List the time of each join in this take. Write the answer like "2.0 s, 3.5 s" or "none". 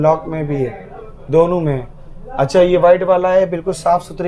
none